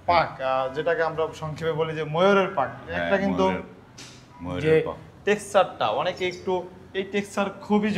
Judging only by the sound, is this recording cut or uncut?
uncut